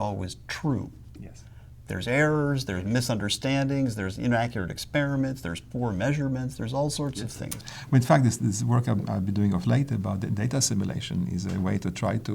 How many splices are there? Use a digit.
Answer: 1